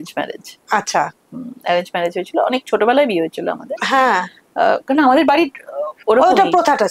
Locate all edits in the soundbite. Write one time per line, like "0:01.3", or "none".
none

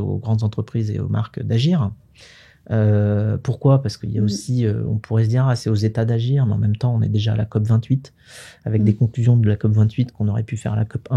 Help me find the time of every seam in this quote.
none

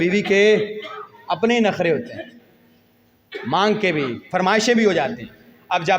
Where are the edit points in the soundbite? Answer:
none

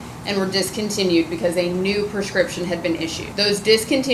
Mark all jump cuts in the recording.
0:03.2

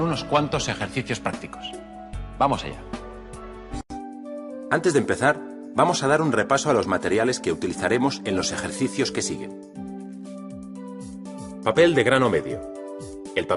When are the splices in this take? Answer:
0:11.3

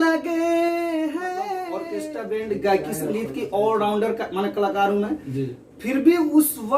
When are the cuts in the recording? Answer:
0:01.8

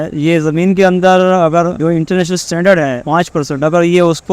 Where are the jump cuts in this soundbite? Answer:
0:01.8
0:03.0

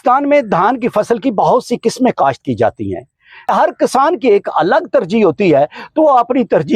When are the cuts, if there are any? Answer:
0:03.5

